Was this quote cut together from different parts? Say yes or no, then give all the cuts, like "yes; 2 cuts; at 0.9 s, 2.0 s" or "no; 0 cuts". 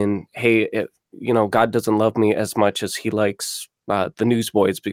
no; 0 cuts